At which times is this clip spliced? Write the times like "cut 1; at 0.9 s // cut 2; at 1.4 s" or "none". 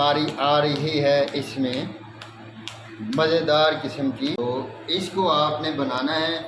cut 1; at 4.4 s